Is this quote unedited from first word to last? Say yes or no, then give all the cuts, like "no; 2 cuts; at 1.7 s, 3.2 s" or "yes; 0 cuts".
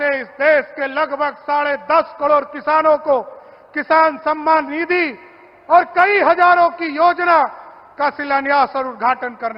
yes; 0 cuts